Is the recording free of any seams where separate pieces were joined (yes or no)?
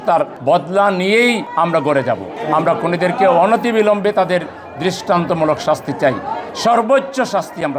yes